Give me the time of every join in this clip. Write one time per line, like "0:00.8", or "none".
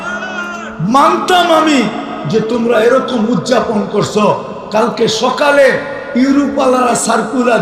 none